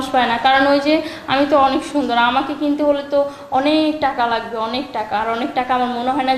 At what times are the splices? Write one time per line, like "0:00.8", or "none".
none